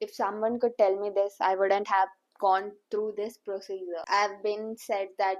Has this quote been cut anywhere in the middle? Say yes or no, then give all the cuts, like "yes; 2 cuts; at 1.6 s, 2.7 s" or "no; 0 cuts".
yes; 1 cut; at 4.0 s